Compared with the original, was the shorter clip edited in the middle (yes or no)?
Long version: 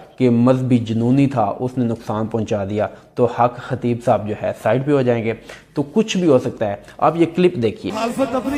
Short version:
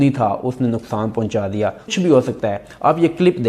yes